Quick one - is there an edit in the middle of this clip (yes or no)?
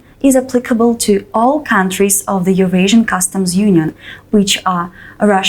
no